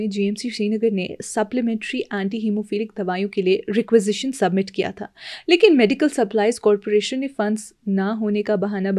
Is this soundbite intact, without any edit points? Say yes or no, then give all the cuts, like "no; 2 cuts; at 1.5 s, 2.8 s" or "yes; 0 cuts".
yes; 0 cuts